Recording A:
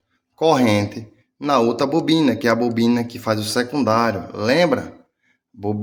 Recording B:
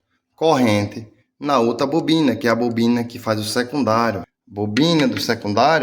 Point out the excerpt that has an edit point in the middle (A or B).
B